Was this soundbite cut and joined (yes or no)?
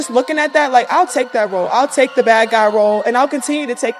no